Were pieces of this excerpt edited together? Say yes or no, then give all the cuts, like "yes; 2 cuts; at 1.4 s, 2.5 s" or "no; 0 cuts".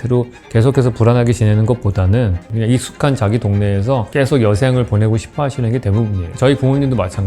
yes; 3 cuts; at 2.4 s, 4.1 s, 6.2 s